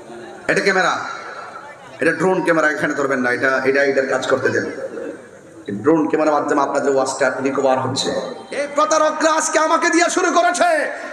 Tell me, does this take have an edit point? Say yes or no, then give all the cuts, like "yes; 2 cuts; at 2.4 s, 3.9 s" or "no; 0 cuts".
yes; 1 cut; at 8.6 s